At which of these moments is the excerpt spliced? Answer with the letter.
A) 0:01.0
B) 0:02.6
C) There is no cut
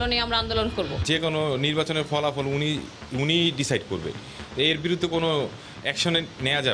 A